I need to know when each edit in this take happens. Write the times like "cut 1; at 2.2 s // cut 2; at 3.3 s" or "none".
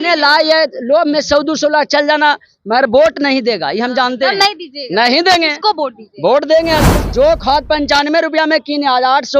cut 1; at 6.9 s